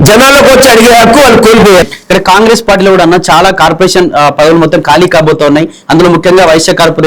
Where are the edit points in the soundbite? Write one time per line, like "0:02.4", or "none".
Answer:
0:01.8